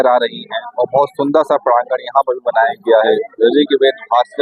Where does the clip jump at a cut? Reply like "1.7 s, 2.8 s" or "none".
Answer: 3.1 s